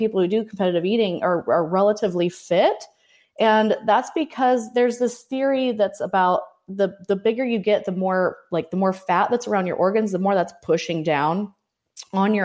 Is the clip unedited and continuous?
yes; 0 cuts

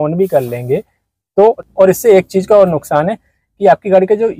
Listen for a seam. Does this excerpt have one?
yes; 1 cut; at 1.6 s

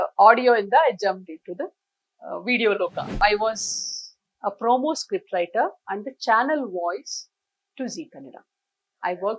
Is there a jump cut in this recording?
yes; 1 cut; at 3.2 s

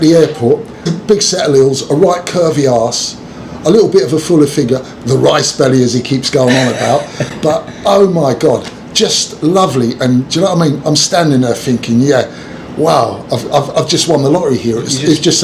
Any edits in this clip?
no; 0 cuts

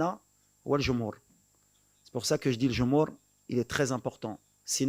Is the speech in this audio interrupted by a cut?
no; 0 cuts

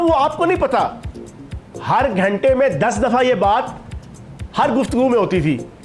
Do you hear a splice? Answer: no; 0 cuts

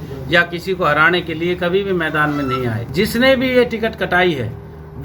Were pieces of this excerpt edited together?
yes; 1 cut; at 2.8 s

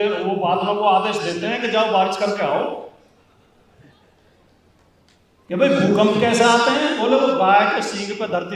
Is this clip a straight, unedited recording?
yes; 0 cuts

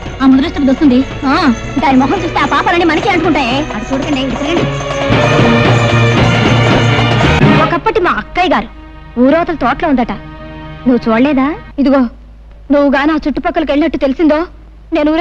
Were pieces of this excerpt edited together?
yes; 2 cuts; at 7.4 s, 11.6 s

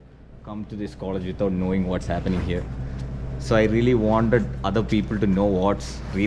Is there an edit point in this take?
no; 0 cuts

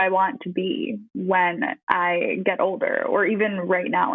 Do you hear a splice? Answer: yes; 2 cuts; at 1.1 s, 1.8 s

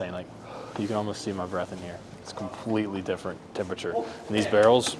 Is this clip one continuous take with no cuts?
yes; 0 cuts

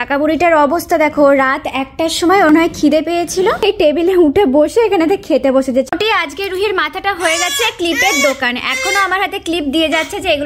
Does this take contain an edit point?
yes; 3 cuts; at 2.5 s, 3.6 s, 5.9 s

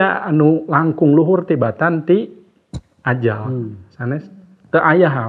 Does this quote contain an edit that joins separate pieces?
no; 0 cuts

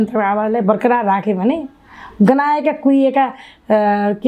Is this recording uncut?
yes; 0 cuts

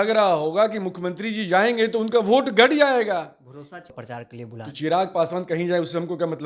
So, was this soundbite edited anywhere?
yes; 1 cut; at 3.9 s

